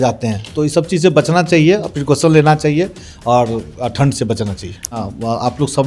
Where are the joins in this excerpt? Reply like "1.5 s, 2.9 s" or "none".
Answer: 4.9 s